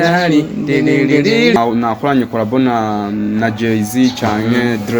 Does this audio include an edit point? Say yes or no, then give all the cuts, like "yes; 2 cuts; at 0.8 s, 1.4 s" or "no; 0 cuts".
yes; 1 cut; at 1.6 s